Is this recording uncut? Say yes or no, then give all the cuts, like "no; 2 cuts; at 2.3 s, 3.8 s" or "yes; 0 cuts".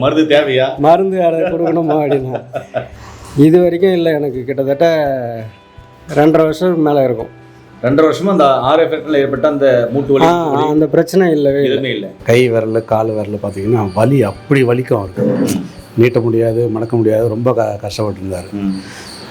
no; 2 cuts; at 2.8 s, 12.1 s